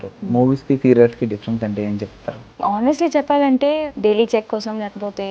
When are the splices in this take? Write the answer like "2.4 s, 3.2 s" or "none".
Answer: 2.4 s, 3.8 s